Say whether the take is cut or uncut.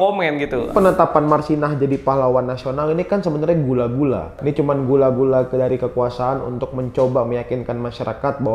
cut